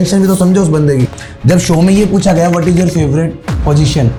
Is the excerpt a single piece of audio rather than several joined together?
yes; 0 cuts

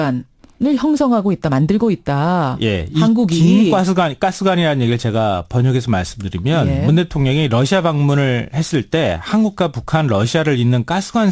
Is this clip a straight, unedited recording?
no; 1 cut; at 7.8 s

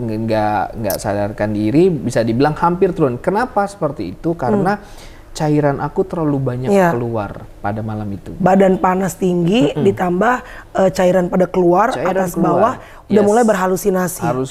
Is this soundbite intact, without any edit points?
yes; 0 cuts

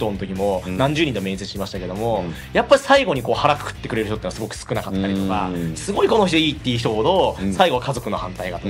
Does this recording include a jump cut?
no; 0 cuts

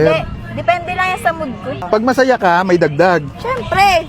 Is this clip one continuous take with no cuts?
no; 1 cut; at 1.7 s

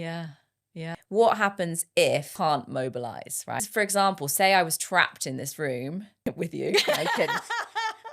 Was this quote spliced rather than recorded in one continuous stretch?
yes; 4 cuts; at 1.0 s, 2.3 s, 3.6 s, 6.1 s

